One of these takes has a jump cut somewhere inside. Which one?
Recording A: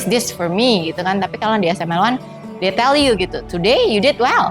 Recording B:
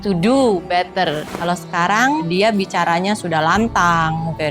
B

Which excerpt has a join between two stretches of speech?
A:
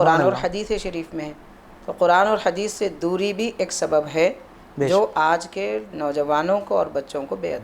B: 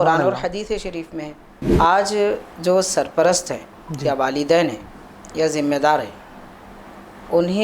B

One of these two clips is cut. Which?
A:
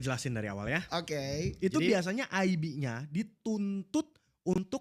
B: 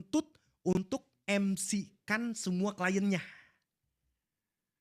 A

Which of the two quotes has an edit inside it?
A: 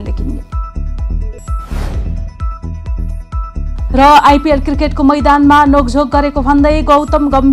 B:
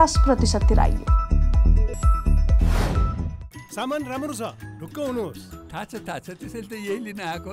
B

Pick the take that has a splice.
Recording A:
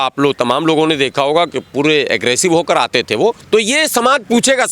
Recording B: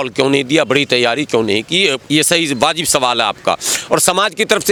A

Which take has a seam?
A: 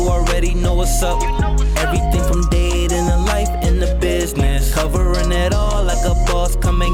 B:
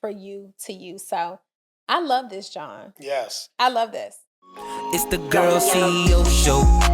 B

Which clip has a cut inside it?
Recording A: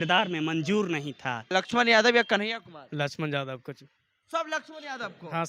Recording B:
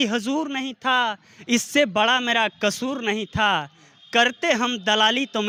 A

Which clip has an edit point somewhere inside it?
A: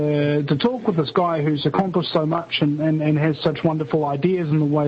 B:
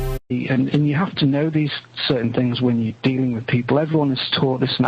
A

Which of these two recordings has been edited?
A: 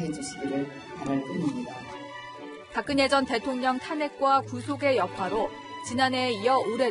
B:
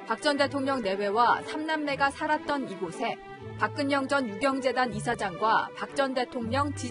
A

